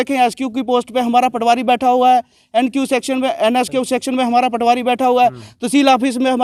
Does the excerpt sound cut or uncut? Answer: uncut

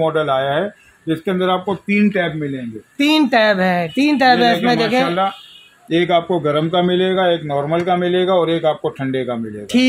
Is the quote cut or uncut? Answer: uncut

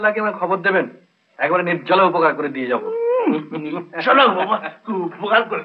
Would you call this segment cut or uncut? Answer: uncut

